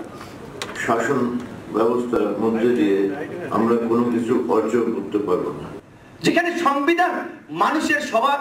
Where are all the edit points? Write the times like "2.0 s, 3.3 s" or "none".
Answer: 5.7 s